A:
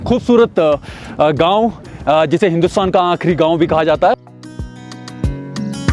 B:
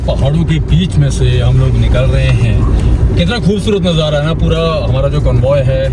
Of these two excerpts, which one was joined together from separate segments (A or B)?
A